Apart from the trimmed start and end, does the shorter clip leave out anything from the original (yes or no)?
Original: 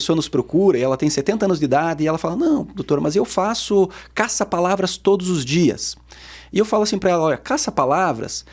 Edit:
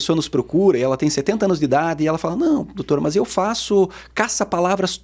no